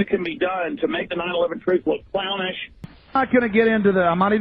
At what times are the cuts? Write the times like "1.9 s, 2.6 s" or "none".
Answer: 2.8 s

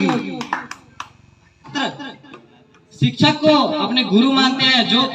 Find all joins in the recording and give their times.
1.7 s

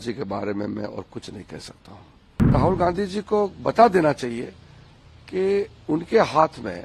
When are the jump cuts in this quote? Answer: 2.5 s

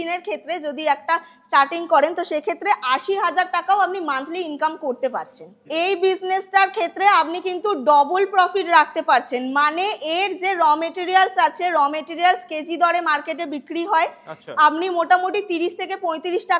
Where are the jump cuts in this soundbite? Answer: 5.6 s

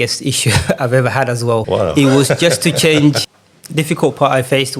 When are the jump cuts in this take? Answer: 1.6 s, 3.2 s

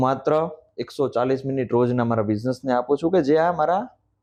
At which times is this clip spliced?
none

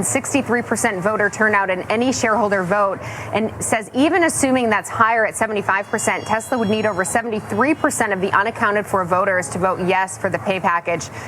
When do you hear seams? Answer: none

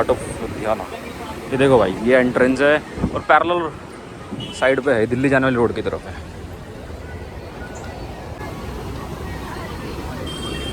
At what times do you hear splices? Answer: none

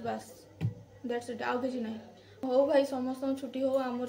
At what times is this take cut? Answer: 2.4 s

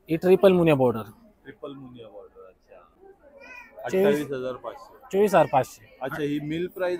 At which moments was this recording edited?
3.0 s

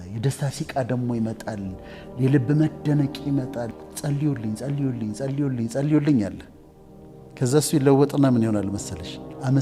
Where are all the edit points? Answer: 3.8 s

